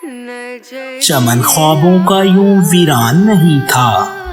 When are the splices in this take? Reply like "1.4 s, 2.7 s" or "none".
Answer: 1.1 s